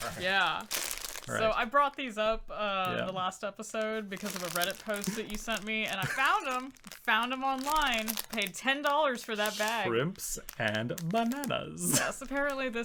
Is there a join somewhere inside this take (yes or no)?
no